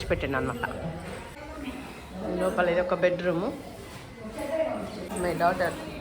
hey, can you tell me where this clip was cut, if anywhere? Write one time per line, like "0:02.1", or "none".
0:00.9
0:05.1